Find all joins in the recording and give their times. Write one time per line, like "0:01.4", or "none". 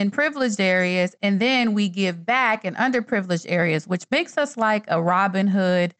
none